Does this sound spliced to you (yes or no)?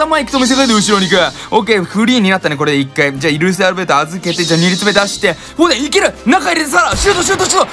no